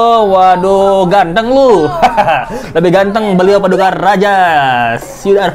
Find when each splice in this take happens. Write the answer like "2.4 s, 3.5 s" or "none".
none